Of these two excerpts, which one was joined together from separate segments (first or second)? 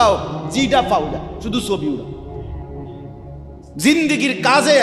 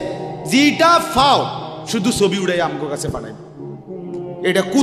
first